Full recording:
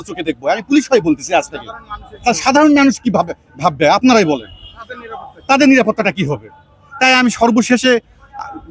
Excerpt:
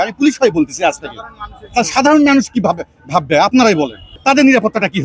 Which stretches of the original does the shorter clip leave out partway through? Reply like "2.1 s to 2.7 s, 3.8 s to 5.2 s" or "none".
4.5 s to 5.3 s